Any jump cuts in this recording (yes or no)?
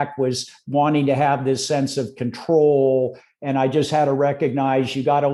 no